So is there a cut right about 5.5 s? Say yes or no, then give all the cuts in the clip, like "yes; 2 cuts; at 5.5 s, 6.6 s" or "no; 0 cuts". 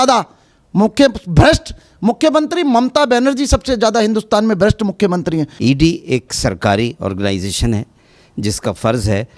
yes; 1 cut; at 5.5 s